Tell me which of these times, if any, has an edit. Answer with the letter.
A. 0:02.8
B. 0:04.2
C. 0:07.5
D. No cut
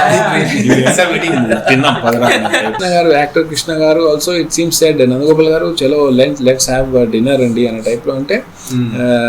A